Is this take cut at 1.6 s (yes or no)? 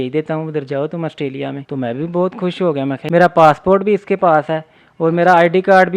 yes